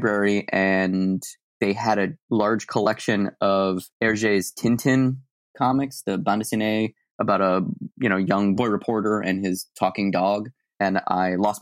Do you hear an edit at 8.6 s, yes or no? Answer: yes